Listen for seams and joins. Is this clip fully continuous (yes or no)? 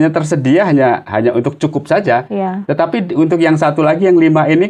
yes